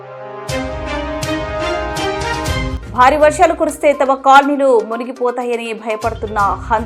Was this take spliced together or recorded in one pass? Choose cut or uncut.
cut